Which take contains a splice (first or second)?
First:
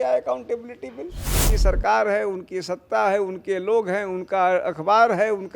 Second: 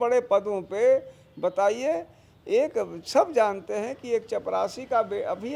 first